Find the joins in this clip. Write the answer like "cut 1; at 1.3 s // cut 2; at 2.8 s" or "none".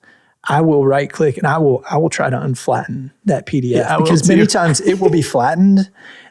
none